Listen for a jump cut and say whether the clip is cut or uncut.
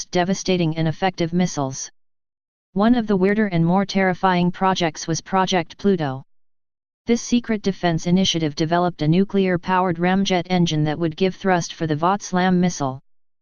cut